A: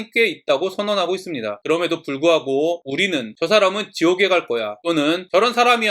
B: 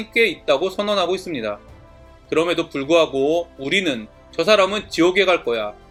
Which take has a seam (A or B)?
A